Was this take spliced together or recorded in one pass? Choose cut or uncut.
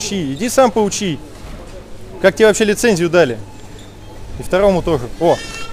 uncut